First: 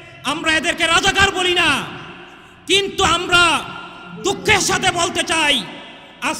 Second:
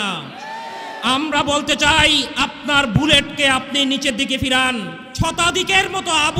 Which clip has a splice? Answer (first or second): second